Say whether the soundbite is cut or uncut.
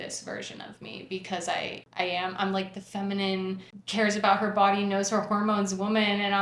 cut